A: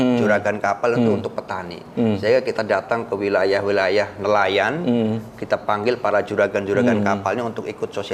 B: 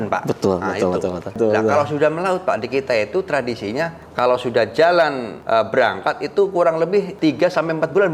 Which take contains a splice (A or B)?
B